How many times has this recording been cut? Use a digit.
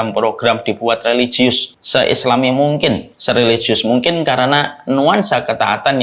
2